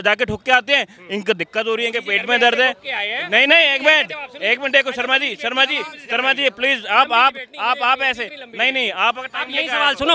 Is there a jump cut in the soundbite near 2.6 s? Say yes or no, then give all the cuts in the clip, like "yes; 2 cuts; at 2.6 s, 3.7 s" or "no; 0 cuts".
no; 0 cuts